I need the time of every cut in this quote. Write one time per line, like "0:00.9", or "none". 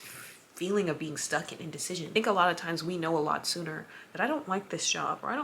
0:02.1